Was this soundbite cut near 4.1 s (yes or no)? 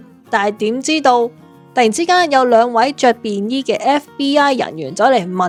no